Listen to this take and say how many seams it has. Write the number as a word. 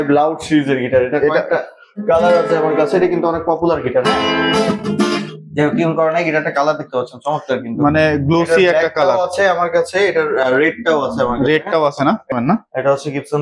one